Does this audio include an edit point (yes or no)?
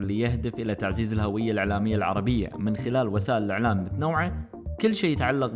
no